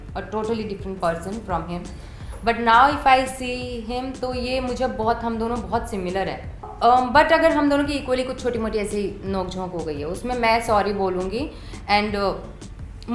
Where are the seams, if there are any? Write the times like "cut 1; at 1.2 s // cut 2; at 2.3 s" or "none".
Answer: cut 1; at 6.7 s

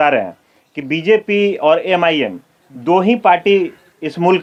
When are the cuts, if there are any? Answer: none

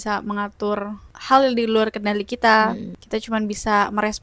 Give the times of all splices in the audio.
cut 1; at 1.1 s // cut 2; at 2.9 s

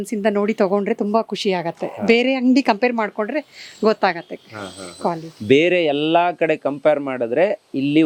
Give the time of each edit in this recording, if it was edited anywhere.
none

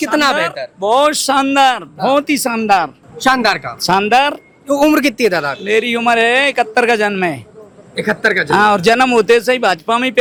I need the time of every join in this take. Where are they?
none

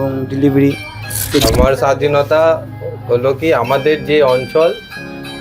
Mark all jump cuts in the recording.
cut 1; at 1.4 s

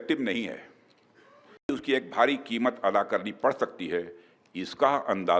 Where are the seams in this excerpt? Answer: cut 1; at 1.7 s

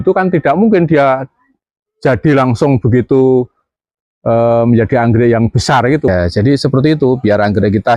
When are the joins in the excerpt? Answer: cut 1; at 6.1 s

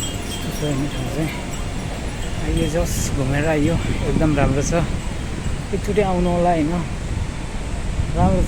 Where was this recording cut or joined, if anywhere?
none

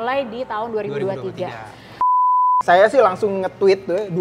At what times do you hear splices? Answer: cut 1; at 2.1 s

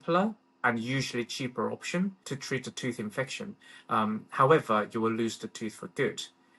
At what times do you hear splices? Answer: cut 1; at 2.2 s

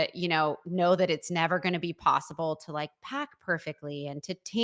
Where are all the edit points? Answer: none

